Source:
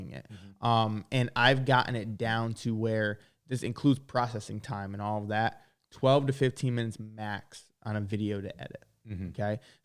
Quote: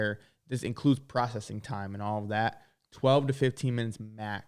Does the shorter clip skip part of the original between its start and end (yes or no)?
no